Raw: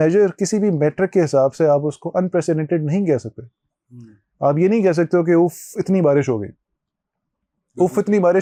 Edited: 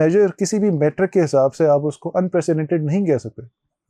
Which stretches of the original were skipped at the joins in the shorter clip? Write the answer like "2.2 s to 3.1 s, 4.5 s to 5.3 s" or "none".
none